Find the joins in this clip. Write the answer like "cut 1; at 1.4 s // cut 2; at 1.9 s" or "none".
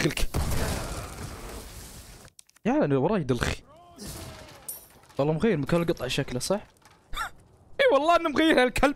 none